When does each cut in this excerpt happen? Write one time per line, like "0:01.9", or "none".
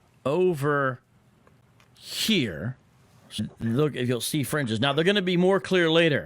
0:03.4